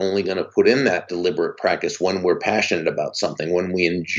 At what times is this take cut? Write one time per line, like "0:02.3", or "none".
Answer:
0:01.1